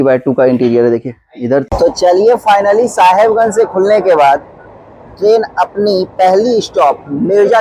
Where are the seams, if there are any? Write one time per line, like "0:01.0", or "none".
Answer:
0:01.7